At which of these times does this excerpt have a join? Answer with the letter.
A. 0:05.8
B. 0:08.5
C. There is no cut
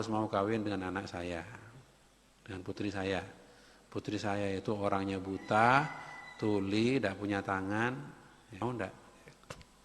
B